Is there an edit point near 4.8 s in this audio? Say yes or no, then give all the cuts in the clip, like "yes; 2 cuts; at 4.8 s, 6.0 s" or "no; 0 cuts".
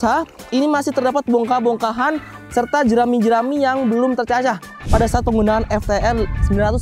yes; 1 cut; at 4.8 s